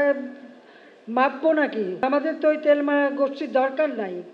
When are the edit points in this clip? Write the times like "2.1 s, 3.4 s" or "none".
2.0 s